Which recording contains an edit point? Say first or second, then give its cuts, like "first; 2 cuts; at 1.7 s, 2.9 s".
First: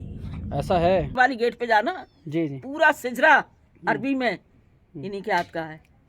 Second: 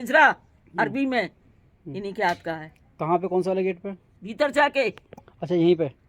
first; 1 cut; at 1.1 s